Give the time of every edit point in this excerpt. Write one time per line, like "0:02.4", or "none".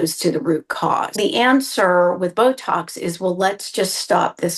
0:01.1